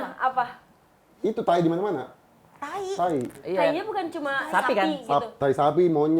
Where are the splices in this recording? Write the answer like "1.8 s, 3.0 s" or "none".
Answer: none

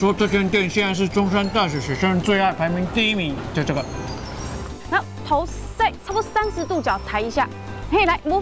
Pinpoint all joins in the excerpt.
4.7 s

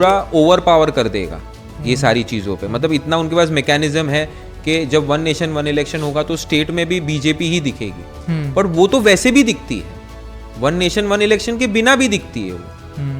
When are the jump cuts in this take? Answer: none

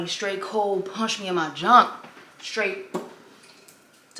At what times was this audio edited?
none

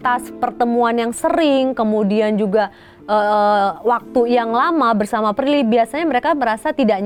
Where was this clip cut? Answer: none

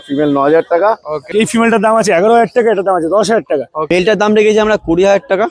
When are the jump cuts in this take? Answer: 1.3 s, 3.9 s

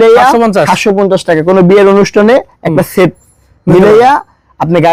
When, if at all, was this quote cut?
none

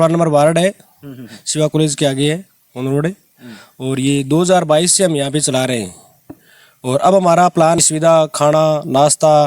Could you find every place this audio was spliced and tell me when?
7.8 s

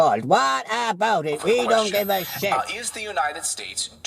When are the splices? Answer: 2.5 s

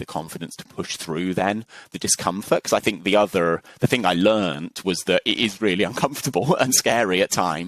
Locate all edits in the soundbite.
none

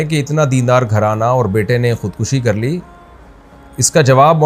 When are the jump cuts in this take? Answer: none

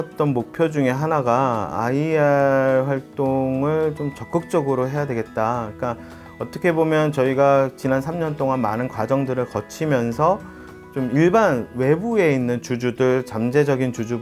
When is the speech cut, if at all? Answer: none

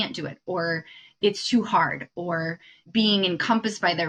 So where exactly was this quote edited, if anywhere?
none

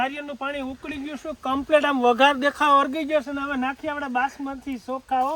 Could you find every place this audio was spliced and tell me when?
none

